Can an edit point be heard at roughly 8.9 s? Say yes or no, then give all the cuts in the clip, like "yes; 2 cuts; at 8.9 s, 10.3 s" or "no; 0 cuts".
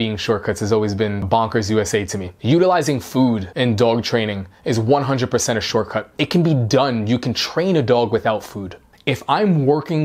yes; 4 cuts; at 1.2 s, 3.5 s, 6.0 s, 8.9 s